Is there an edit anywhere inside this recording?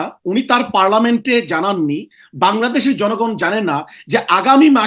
no; 0 cuts

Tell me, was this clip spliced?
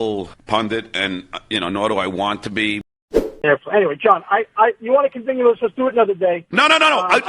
yes; 1 cut; at 3.4 s

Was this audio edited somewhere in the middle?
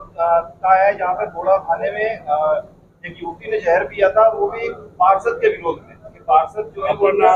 no; 0 cuts

